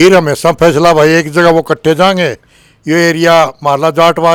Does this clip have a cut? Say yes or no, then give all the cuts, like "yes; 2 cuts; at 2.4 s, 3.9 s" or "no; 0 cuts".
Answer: no; 0 cuts